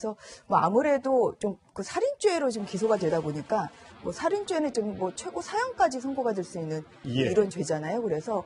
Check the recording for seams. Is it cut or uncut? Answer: cut